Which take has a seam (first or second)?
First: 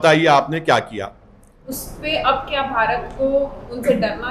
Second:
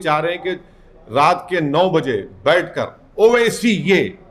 first